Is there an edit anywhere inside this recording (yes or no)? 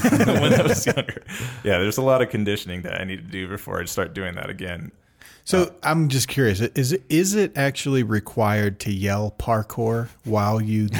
yes